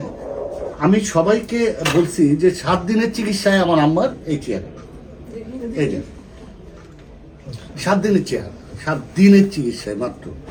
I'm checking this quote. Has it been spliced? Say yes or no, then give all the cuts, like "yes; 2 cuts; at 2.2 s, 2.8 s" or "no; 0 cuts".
no; 0 cuts